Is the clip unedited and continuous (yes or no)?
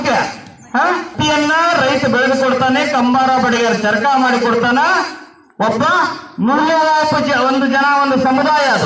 no